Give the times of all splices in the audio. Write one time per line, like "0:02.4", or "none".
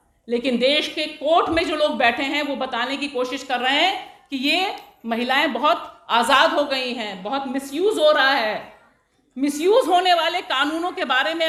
none